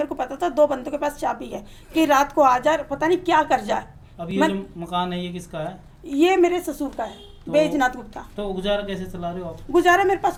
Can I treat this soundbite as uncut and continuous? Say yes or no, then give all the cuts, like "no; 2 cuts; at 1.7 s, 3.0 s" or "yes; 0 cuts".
yes; 0 cuts